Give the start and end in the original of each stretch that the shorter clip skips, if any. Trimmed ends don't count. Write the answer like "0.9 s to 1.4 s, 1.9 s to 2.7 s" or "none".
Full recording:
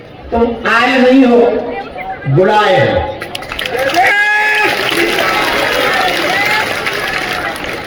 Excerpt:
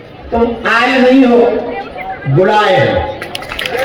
none